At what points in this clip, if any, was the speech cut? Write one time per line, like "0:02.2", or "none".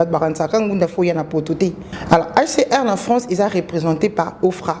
0:01.9

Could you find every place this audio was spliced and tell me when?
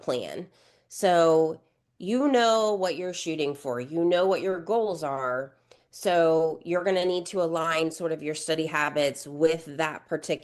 none

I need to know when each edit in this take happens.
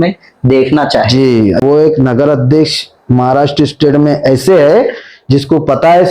0:01.6

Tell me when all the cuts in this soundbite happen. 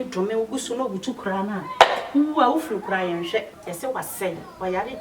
0:03.6

